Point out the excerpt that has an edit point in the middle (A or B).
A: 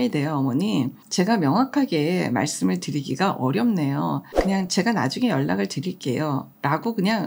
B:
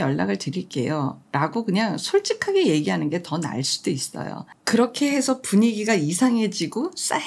A